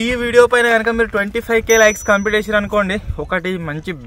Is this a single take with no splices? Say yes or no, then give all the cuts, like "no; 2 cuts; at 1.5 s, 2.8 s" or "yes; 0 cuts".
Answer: yes; 0 cuts